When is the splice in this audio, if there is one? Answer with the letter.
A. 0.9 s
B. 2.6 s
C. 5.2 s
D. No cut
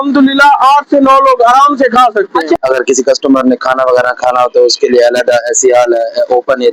B